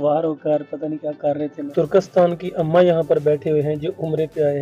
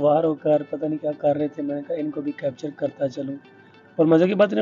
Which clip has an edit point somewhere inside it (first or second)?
first